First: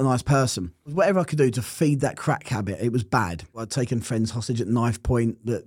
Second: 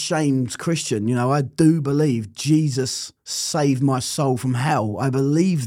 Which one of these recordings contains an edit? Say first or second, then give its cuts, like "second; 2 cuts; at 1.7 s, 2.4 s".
first; 2 cuts; at 0.9 s, 3.7 s